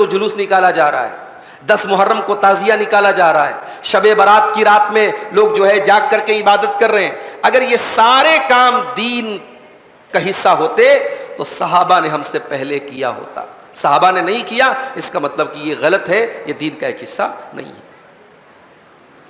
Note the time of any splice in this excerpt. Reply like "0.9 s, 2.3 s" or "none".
none